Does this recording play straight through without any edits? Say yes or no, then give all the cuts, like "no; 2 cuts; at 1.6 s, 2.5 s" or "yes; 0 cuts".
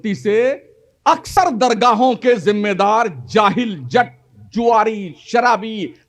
no; 1 cut; at 1.3 s